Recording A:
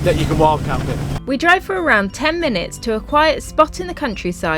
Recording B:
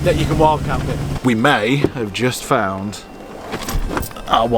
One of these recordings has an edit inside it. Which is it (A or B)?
B